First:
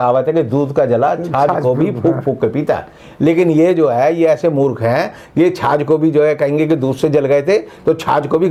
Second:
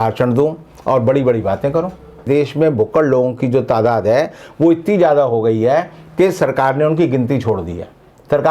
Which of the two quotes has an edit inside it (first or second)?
second